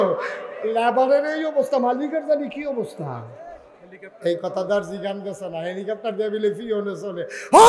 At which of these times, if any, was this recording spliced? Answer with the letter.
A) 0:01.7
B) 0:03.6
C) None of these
C